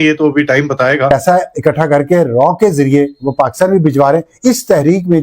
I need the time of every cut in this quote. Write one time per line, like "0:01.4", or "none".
0:01.1